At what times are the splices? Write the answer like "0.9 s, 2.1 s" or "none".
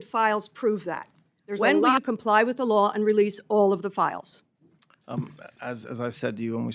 1.8 s

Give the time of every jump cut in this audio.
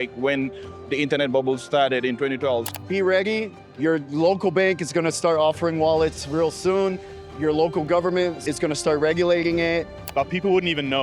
2.7 s, 8.5 s, 10.0 s

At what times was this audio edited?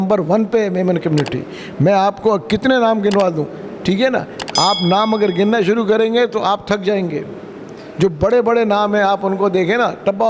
none

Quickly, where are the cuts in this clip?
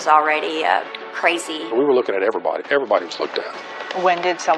1.6 s

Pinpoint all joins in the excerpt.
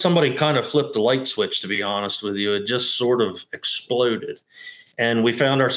none

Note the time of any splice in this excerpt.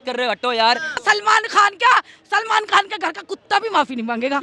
1.0 s

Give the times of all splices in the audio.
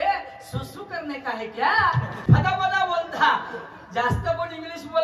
2.1 s

